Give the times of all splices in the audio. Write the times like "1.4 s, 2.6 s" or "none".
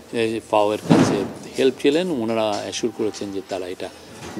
none